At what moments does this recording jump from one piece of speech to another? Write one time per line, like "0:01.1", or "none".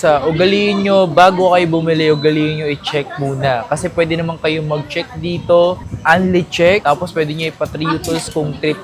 none